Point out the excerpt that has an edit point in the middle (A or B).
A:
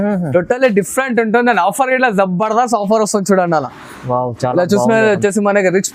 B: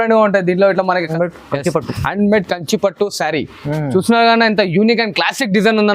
B